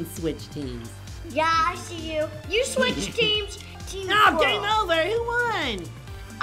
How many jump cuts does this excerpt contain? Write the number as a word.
one